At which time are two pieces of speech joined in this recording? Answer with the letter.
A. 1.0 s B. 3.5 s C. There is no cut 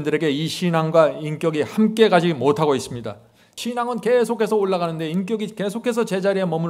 B